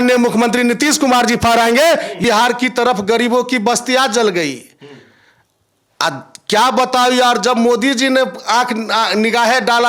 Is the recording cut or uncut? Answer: cut